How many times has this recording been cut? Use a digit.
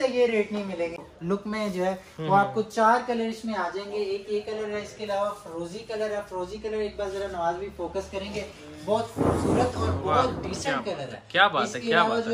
1